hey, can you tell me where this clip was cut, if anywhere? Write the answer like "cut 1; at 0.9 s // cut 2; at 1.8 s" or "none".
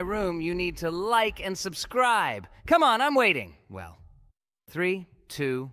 none